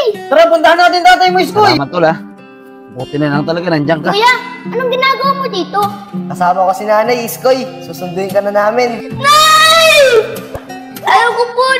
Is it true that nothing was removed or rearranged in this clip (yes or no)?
no